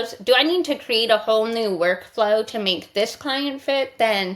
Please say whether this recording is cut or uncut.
uncut